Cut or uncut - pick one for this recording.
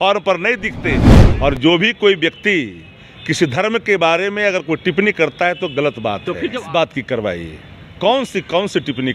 cut